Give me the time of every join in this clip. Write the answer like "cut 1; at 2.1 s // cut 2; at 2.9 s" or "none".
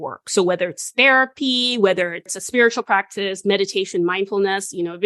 cut 1; at 2.3 s